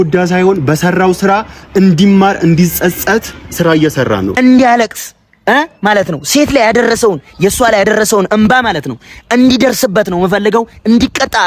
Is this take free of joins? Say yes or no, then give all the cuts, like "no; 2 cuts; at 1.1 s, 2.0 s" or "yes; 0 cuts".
no; 1 cut; at 4.3 s